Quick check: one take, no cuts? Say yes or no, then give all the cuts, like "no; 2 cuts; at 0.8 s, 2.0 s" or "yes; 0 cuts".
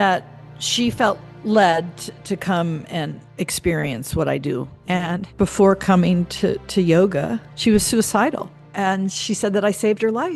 no; 4 cuts; at 3.2 s, 4.7 s, 7.5 s, 8.6 s